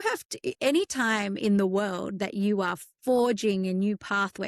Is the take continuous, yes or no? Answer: yes